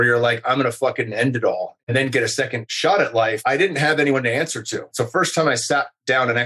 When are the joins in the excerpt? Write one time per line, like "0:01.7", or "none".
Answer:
0:01.7
0:02.6
0:03.4
0:05.0